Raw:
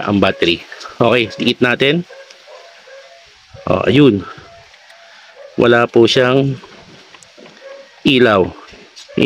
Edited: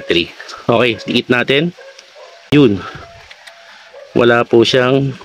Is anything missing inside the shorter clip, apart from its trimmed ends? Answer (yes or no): yes